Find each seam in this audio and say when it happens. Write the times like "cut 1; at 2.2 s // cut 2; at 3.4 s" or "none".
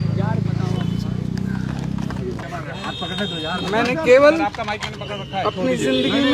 cut 1; at 2.4 s

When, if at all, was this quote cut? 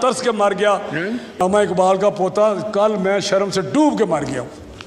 cut 1; at 1.2 s

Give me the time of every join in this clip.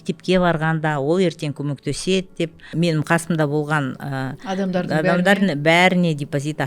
cut 1; at 2.7 s

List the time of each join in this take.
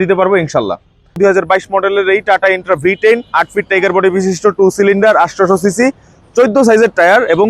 cut 1; at 1.2 s

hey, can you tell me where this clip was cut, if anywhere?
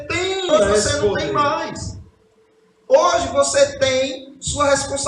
cut 1; at 1.3 s

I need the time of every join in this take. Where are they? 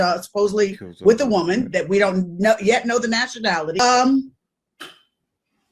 cut 1; at 3.8 s

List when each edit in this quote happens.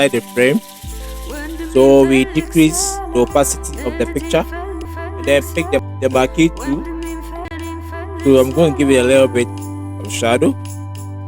cut 1; at 4.9 s // cut 2; at 5.9 s // cut 3; at 7.4 s

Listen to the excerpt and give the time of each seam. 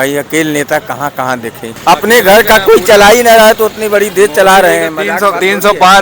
cut 1; at 1.7 s

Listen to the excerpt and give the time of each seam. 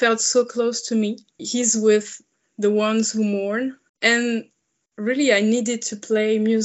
cut 1; at 1.4 s // cut 2; at 3.9 s

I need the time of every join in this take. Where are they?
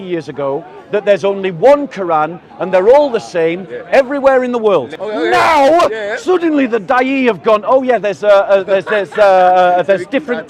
cut 1; at 5.0 s // cut 2; at 6.1 s

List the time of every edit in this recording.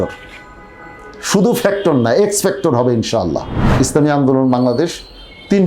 cut 1; at 3.6 s

